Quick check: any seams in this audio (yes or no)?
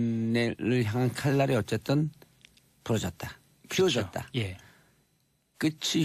no